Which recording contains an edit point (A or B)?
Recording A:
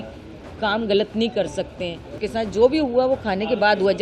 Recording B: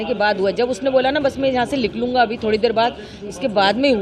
A